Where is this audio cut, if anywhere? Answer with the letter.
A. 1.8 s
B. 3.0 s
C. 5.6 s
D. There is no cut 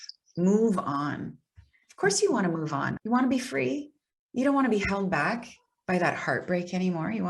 B